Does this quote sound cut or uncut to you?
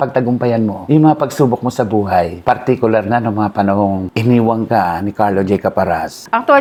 uncut